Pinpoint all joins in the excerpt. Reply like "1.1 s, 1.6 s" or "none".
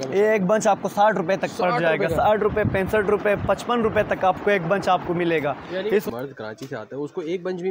6.1 s

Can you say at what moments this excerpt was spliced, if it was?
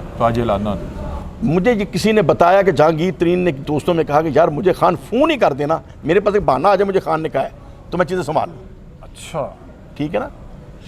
none

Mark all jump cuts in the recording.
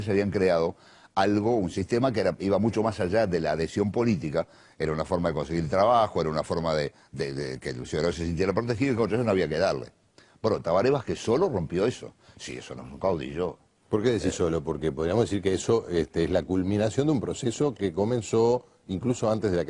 none

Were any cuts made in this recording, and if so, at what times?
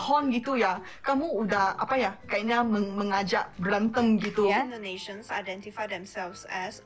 4.5 s

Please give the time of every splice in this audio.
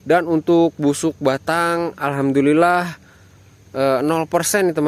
none

